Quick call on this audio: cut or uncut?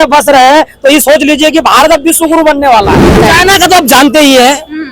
cut